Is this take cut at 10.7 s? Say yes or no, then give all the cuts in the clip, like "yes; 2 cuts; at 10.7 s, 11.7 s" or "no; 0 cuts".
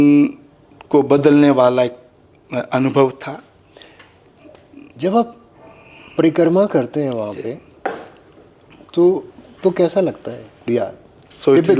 yes; 1 cut; at 10.7 s